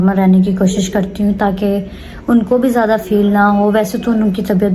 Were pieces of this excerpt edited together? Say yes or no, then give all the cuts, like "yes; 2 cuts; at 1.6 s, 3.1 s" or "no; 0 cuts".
no; 0 cuts